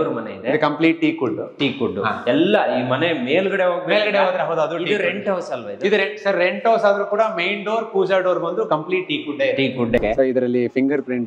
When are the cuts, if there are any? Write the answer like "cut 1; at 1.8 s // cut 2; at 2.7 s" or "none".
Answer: cut 1; at 10.0 s